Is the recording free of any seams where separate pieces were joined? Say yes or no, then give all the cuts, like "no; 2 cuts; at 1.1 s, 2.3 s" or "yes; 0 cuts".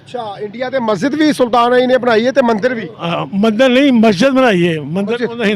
yes; 0 cuts